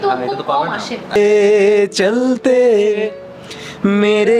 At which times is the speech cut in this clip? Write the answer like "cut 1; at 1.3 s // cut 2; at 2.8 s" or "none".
cut 1; at 1.2 s